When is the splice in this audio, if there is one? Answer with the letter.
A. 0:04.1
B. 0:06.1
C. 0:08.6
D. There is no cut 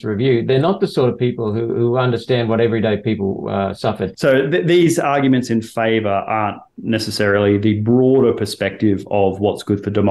A